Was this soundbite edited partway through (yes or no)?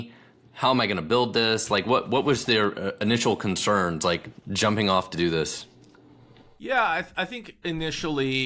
no